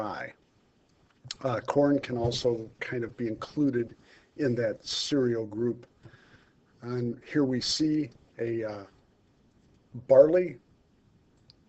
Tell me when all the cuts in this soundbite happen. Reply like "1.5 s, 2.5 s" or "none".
9.1 s